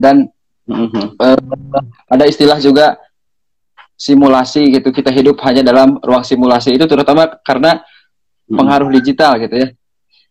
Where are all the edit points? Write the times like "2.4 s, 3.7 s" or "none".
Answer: 3.0 s